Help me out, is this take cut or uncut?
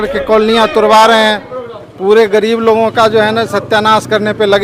uncut